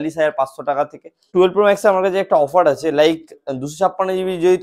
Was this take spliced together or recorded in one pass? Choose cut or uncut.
cut